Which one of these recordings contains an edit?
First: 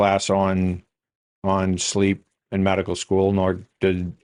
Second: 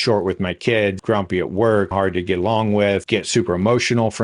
second; 3 cuts; at 1.0 s, 1.9 s, 3.0 s

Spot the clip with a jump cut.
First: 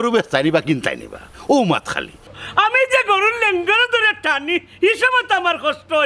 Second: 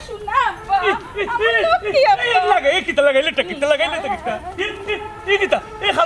first; 1 cut; at 2.3 s

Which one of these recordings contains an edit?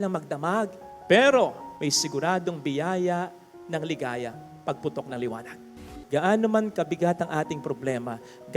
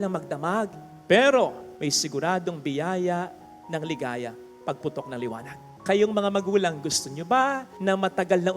first; 1 cut; at 5.8 s

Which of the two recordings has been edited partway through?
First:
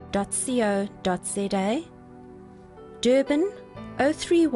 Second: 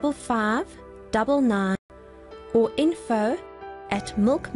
second; 1 cut; at 1.8 s

